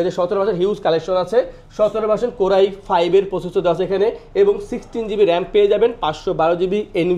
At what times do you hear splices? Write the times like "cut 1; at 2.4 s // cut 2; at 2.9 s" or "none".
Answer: none